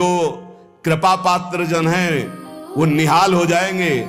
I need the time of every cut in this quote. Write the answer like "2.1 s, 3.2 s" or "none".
none